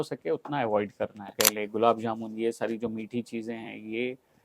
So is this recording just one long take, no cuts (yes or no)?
no